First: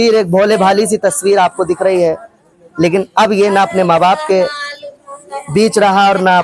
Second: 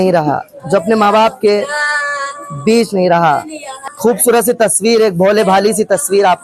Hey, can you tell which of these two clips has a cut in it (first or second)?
second